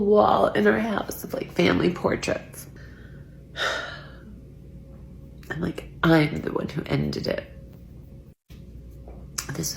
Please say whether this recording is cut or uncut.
cut